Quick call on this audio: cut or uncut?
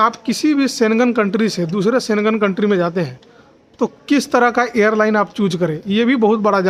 uncut